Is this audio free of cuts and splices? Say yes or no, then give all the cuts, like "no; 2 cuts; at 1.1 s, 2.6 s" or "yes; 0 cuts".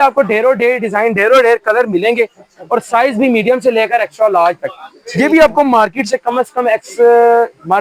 yes; 0 cuts